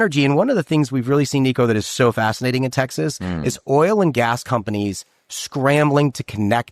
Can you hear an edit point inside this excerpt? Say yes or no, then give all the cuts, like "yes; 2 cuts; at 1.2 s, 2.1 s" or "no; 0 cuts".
no; 0 cuts